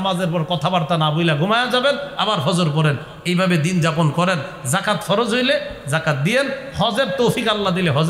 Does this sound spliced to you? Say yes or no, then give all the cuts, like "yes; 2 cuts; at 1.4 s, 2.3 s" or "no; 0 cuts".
no; 0 cuts